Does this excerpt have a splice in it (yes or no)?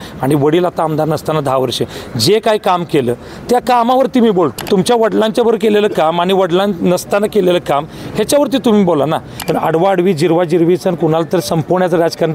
yes